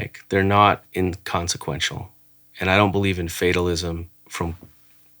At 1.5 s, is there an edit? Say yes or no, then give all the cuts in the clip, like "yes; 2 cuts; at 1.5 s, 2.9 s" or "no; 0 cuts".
no; 1 cut; at 4.2 s